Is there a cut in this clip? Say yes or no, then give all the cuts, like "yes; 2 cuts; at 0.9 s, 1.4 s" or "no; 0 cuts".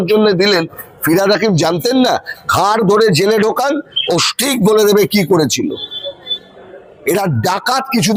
no; 0 cuts